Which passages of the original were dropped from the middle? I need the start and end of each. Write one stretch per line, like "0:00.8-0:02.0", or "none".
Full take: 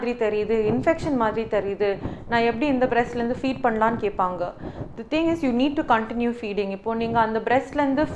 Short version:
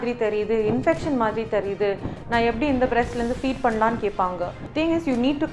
0:04.6-0:05.0

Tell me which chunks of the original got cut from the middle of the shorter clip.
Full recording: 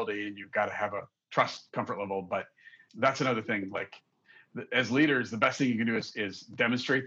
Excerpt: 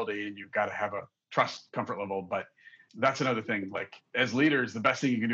0:04.0-0:04.6

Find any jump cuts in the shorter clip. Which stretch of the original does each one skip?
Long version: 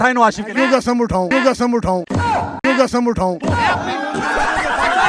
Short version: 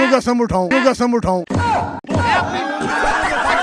0:02.6-0:03.3

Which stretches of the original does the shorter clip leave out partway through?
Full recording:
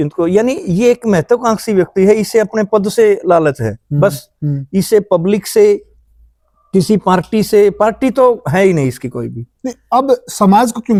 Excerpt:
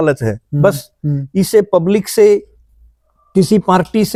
none

